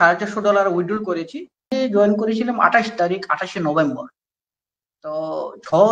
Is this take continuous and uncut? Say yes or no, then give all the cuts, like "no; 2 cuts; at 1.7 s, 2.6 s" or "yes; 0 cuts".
no; 1 cut; at 1.7 s